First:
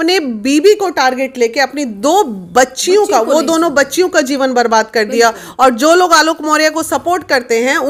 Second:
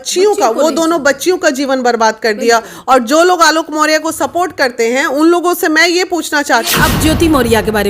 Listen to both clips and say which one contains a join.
second; 1 cut; at 6.7 s

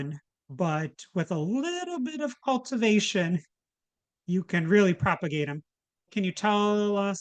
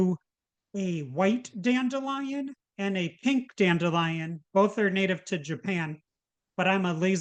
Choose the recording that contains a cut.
first; 1 cut; at 6.1 s

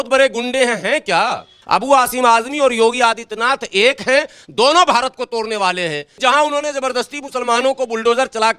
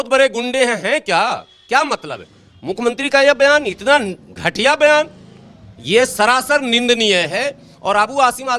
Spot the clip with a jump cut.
first; 2 cuts; at 1.5 s, 6.1 s

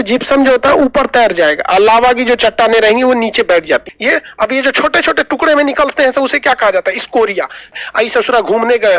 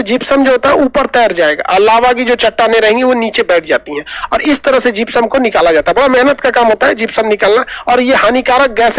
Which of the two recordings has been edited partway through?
first; 2 cuts; at 3.9 s, 7.7 s

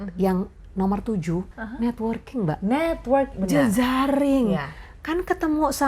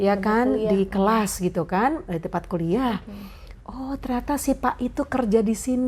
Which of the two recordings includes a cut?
first; 1 cut; at 1.5 s

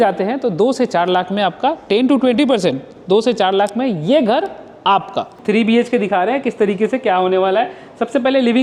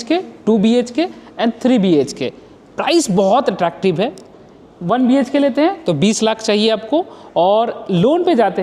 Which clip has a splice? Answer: first; 1 cut; at 5.4 s

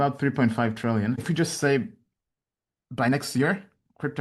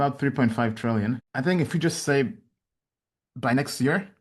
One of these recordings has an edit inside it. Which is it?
first; 1 cut; at 1.2 s

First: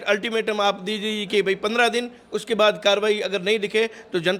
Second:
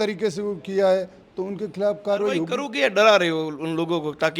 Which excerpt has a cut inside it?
second; 1 cut; at 2.5 s

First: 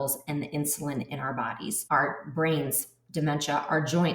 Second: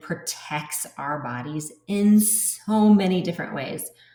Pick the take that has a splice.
first; 1 cut; at 1.8 s

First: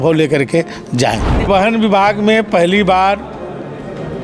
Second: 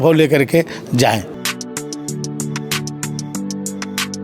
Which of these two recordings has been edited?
first; 1 cut; at 1.3 s

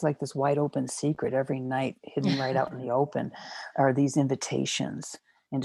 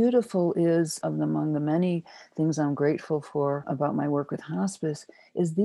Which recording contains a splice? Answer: second; 2 cuts; at 0.9 s, 3.7 s

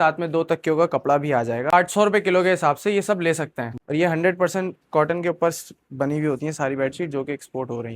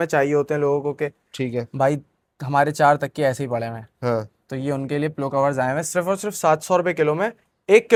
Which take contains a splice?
first; 2 cuts; at 1.7 s, 3.7 s

